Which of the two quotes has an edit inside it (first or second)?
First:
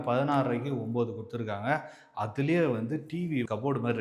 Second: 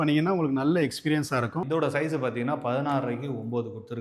second